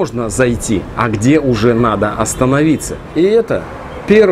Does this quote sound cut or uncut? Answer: cut